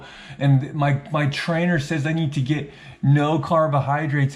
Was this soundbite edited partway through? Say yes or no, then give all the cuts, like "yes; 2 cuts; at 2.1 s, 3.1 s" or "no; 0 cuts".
no; 0 cuts